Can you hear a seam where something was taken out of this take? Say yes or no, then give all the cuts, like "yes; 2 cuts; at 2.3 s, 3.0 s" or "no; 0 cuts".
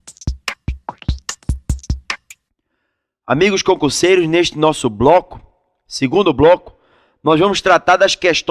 yes; 1 cut; at 2.3 s